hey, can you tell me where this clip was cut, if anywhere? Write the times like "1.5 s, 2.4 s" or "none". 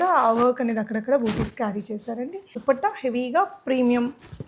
2.5 s